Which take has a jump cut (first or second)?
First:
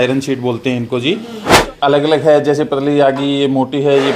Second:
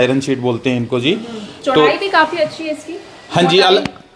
first